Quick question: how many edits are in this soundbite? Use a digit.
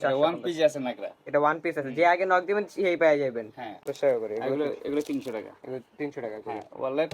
1